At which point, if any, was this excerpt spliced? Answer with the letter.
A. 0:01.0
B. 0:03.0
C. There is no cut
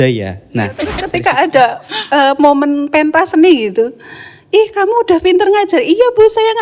A